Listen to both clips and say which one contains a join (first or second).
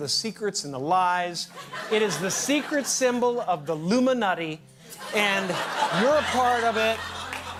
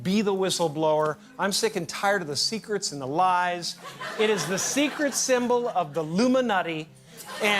second